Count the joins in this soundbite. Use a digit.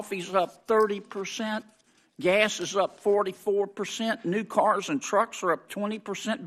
0